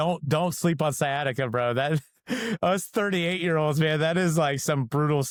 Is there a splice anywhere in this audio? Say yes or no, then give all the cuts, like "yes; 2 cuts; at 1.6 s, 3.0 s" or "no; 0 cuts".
no; 0 cuts